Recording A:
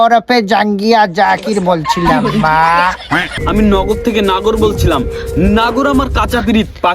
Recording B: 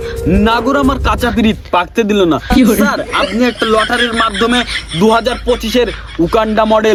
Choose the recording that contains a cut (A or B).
A